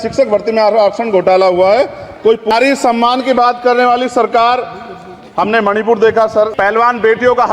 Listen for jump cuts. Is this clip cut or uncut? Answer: cut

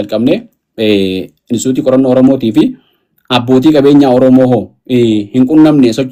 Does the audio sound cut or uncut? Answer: uncut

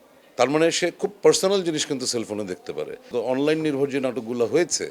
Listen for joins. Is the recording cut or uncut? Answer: cut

